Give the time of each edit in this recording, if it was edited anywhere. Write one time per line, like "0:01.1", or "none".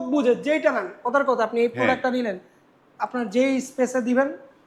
none